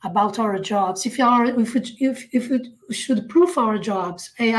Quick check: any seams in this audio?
no; 0 cuts

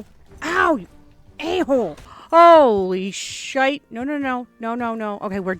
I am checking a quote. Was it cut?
yes; 1 cut; at 2.1 s

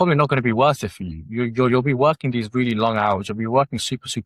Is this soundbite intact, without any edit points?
yes; 0 cuts

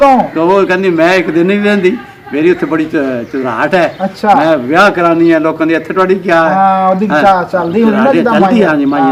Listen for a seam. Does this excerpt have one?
no; 0 cuts

